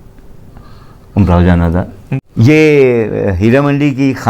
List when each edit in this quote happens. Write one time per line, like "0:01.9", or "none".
0:02.0

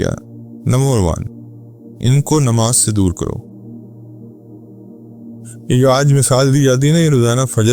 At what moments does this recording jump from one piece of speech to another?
0:03.4
0:05.4

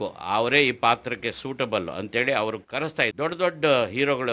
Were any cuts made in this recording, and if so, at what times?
0:03.1

